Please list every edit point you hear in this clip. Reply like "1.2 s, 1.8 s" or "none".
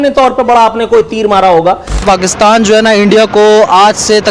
2.0 s